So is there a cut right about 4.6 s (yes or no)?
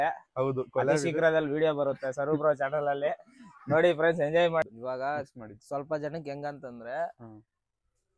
yes